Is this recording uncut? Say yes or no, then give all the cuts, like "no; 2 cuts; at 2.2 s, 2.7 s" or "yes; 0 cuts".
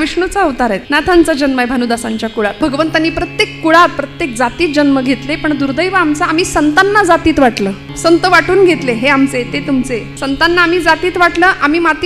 no; 4 cuts; at 1.0 s, 2.6 s, 7.8 s, 10.1 s